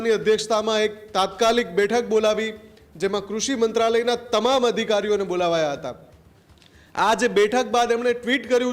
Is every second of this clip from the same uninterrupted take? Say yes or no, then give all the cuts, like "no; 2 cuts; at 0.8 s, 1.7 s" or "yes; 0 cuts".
yes; 0 cuts